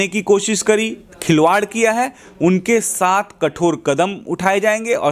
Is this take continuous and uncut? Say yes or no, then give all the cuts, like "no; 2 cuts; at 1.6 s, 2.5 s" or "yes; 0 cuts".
yes; 0 cuts